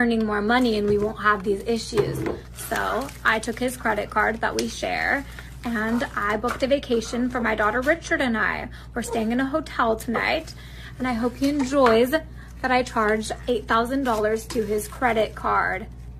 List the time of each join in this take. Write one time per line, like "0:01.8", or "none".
0:03.8
0:08.9